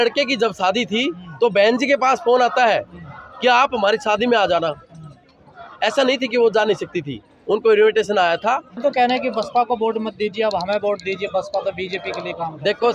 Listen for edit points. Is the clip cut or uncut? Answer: cut